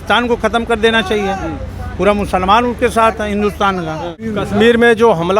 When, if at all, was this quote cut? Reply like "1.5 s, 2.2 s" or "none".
4.2 s

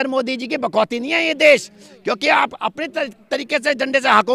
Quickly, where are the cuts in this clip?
none

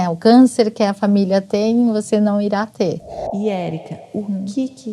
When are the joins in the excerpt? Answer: 3.2 s

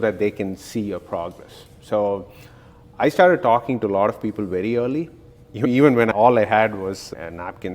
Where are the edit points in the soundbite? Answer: 6.1 s

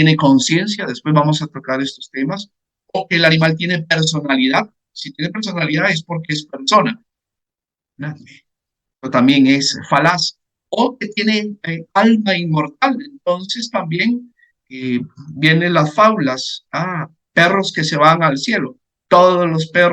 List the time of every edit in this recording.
none

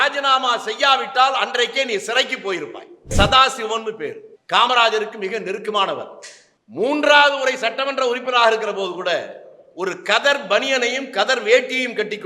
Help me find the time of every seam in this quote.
3.1 s, 6.4 s

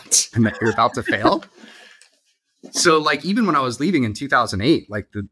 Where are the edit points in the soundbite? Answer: none

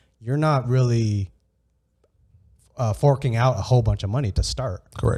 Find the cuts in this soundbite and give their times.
none

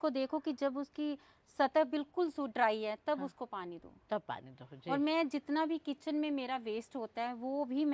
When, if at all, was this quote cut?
none

